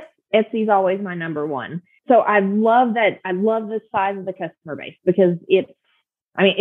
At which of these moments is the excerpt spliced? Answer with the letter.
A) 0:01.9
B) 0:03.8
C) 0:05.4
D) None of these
A